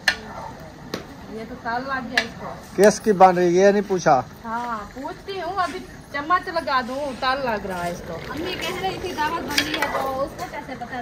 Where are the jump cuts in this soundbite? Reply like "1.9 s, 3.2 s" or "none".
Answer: none